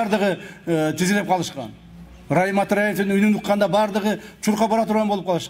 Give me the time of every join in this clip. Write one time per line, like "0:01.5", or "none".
none